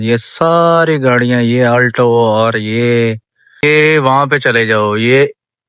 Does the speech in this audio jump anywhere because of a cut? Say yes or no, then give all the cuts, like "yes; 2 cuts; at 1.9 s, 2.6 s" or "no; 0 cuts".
yes; 1 cut; at 3.6 s